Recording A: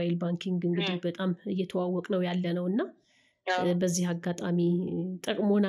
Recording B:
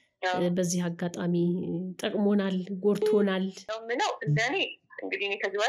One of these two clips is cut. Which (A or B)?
B